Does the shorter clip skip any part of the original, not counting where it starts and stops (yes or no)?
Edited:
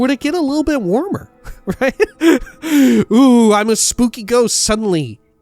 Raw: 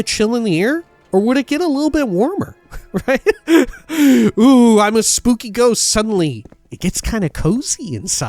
no